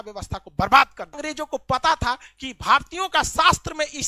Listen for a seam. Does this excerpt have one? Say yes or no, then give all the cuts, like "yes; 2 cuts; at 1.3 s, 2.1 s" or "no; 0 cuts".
yes; 1 cut; at 1.2 s